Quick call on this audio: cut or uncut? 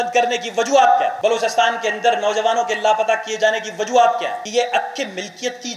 cut